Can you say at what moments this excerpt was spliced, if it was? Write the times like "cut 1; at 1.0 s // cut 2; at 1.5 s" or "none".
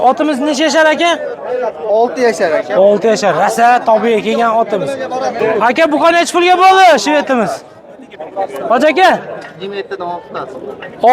cut 1; at 5.4 s